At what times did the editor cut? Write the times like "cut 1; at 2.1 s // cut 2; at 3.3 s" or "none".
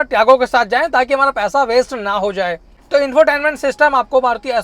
cut 1; at 2.7 s